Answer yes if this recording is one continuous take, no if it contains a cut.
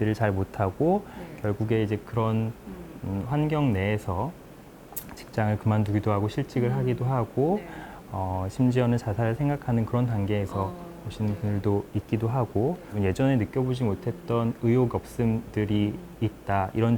no